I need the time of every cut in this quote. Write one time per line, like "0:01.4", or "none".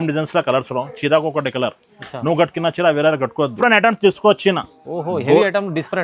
0:03.5